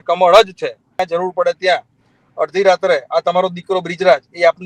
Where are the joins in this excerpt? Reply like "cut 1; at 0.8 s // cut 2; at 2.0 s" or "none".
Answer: cut 1; at 0.9 s